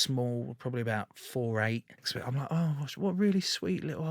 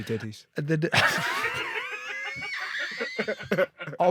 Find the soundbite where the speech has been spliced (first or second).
first